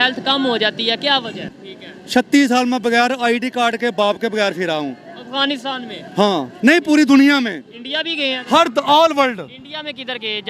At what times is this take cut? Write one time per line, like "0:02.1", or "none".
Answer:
0:01.5

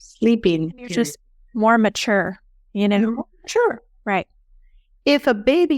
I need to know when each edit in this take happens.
none

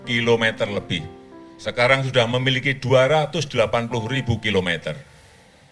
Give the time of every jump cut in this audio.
none

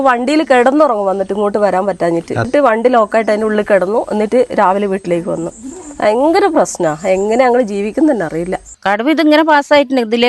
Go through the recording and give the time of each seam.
0:02.5
0:08.7

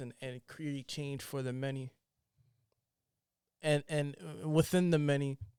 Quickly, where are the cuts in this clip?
none

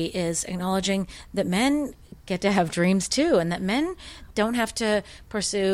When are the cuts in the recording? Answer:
0:04.2

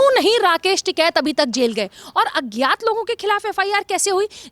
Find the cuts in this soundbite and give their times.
none

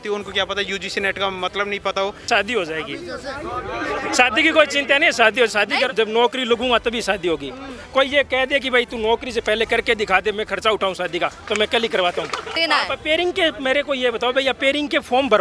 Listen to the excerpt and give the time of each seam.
0:02.3
0:05.9
0:12.5

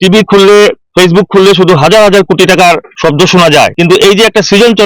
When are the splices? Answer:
0:00.8
0:02.9
0:03.7

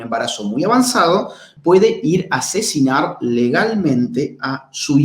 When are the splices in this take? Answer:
0:01.5

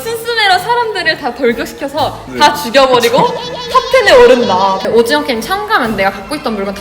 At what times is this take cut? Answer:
0:04.9

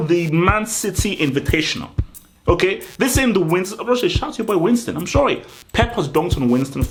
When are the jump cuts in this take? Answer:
none

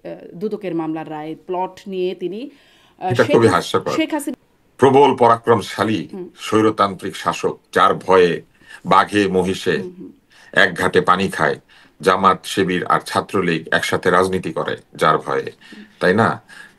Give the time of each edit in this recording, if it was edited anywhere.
0:04.3

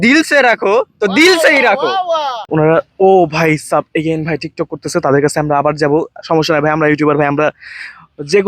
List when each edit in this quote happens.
0:02.5

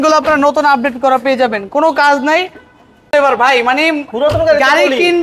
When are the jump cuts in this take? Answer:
0:03.1

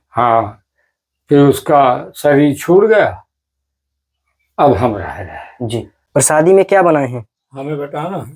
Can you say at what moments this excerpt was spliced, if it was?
0:06.1

